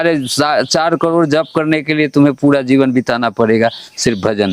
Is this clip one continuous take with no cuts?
yes; 0 cuts

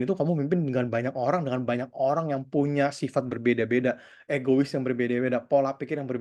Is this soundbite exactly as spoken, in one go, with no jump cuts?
yes; 0 cuts

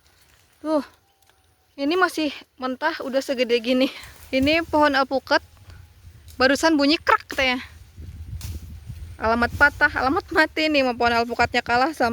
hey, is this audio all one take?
no; 1 cut; at 4.1 s

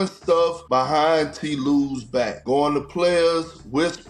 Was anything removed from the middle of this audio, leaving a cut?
no; 0 cuts

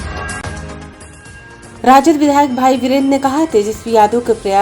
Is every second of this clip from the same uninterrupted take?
no; 1 cut; at 1.2 s

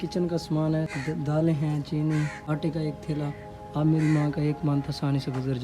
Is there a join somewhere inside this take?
yes; 2 cuts; at 0.9 s, 2.4 s

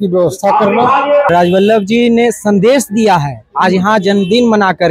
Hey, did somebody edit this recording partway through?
yes; 1 cut; at 1.3 s

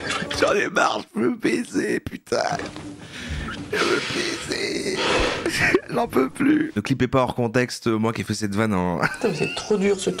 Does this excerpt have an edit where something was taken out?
yes; 1 cut; at 6.7 s

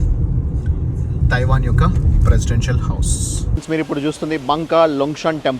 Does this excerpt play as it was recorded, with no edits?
no; 1 cut; at 3.6 s

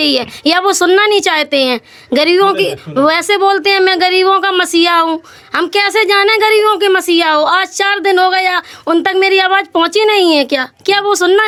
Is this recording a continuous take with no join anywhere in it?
yes; 0 cuts

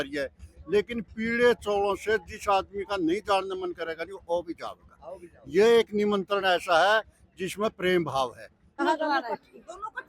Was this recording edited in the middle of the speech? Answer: yes; 1 cut; at 8.7 s

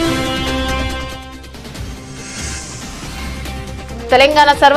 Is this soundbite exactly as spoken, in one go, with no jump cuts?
yes; 0 cuts

